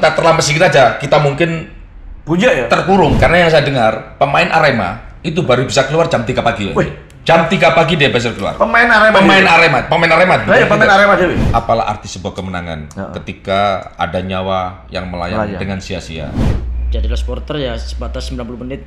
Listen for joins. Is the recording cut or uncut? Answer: cut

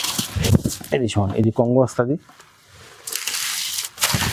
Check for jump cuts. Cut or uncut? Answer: uncut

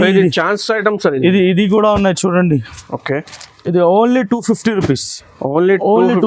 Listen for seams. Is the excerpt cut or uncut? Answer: uncut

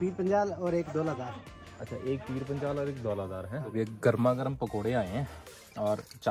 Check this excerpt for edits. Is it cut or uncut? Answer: cut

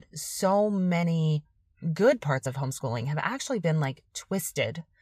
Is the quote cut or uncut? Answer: uncut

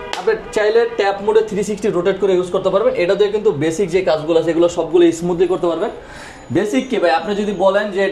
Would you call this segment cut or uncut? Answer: uncut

